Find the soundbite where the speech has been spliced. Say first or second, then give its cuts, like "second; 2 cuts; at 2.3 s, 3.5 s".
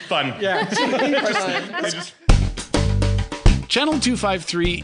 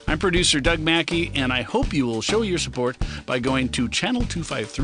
first; 1 cut; at 2.1 s